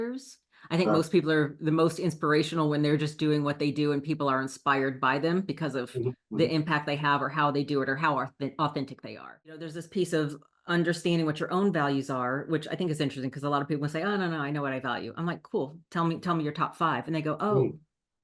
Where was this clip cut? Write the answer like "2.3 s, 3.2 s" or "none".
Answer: 9.7 s